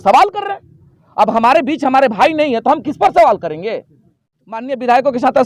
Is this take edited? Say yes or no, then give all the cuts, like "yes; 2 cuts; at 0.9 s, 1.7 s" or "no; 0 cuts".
yes; 1 cut; at 4.2 s